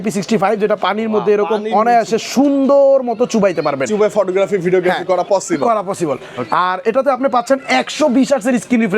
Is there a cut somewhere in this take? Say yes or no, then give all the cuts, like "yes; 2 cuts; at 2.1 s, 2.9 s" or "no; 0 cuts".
no; 0 cuts